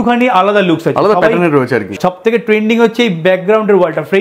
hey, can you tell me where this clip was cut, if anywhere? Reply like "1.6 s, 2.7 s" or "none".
1.9 s